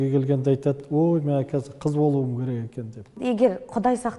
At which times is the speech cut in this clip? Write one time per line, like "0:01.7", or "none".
0:03.1